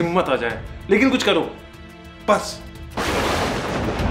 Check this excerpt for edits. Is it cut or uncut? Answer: cut